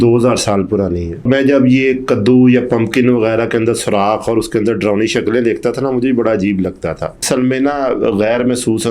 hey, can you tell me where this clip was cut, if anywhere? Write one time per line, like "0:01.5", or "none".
0:01.3
0:07.2